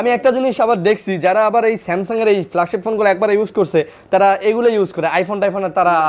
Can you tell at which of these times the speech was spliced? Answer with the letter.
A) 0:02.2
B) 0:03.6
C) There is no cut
C